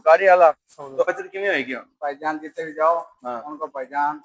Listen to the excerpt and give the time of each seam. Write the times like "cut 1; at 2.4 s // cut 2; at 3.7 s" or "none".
cut 1; at 1.0 s